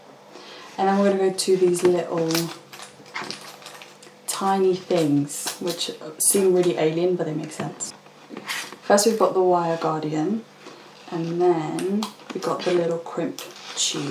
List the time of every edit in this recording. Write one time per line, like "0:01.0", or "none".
none